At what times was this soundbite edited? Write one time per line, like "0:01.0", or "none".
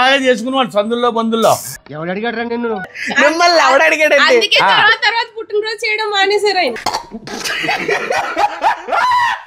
none

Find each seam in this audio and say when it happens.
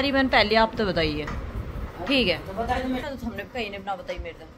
0:03.0

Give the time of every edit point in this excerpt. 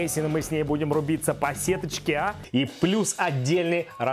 0:02.4

